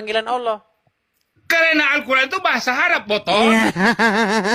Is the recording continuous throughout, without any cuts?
yes; 0 cuts

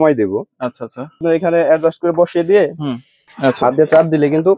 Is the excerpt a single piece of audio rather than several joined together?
no; 2 cuts; at 1.2 s, 3.3 s

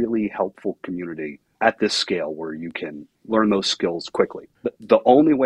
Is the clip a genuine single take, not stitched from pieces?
no; 3 cuts; at 1.4 s, 3.1 s, 4.4 s

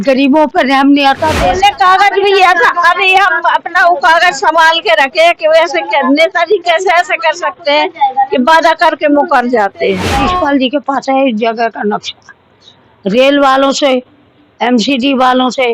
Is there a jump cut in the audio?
yes; 2 cuts; at 1.4 s, 10.2 s

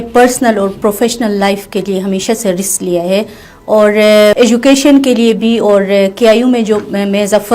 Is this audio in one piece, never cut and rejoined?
yes; 0 cuts

